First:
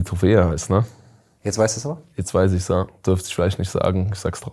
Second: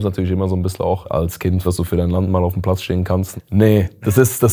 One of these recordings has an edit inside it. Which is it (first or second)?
second